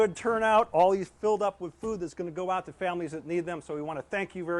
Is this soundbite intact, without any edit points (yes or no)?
yes